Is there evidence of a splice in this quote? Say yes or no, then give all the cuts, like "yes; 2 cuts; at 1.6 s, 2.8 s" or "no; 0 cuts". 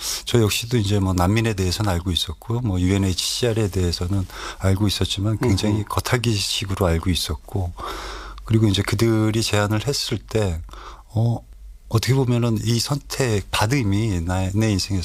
no; 0 cuts